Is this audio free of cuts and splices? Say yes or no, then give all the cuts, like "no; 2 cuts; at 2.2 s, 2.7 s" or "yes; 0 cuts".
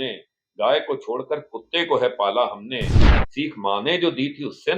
no; 1 cut; at 3.1 s